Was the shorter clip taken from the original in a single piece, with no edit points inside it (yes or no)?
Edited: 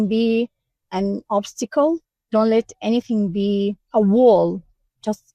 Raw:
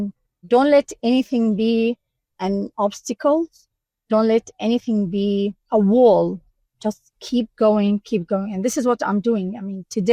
no